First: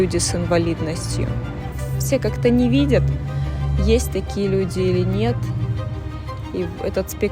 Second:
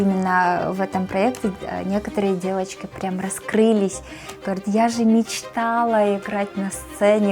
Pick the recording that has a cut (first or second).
first